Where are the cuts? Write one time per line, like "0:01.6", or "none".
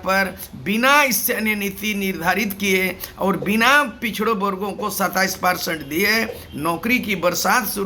none